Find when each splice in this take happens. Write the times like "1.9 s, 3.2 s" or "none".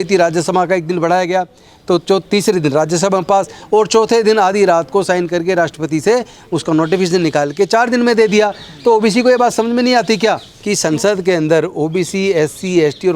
10.5 s